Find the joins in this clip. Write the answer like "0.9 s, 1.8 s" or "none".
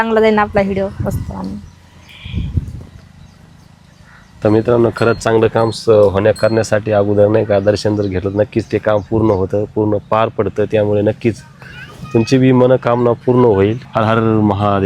14.0 s